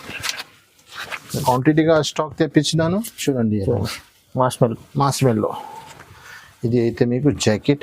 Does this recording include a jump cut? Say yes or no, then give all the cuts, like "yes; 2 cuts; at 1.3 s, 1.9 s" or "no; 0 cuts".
yes; 1 cut; at 1.4 s